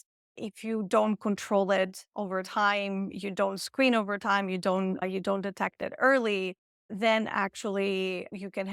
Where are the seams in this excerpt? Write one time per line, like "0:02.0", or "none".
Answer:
none